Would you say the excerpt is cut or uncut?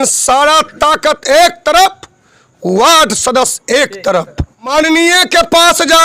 cut